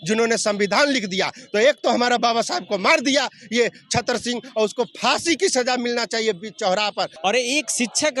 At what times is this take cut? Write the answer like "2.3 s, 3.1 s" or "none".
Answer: 7.1 s